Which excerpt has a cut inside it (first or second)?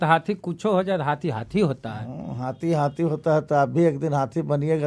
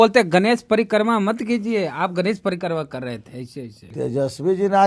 second